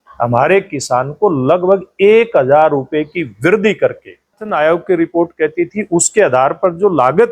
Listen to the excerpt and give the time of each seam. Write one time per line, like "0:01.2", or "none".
0:04.5